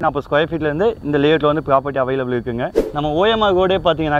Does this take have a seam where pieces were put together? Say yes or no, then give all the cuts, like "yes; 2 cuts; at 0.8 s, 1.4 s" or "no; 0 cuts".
yes; 1 cut; at 2.7 s